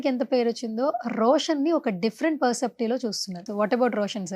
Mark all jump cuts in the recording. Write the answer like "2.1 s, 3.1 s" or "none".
3.4 s